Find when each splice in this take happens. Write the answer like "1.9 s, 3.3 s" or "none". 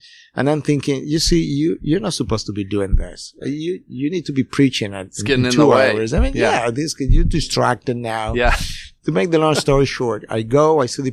none

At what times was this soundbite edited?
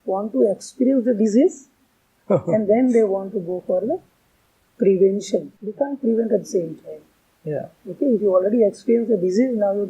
5.6 s

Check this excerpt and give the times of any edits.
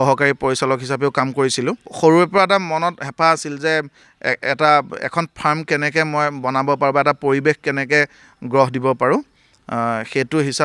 1.9 s

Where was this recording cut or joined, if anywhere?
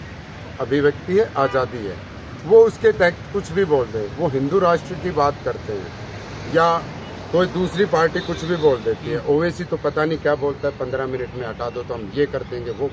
none

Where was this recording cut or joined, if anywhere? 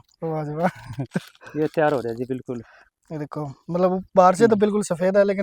none

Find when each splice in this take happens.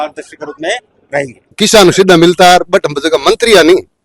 1.5 s

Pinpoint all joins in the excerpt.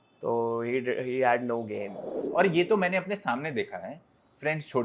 2.3 s

